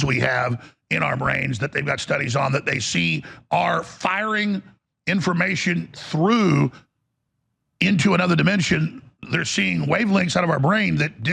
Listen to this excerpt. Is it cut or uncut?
uncut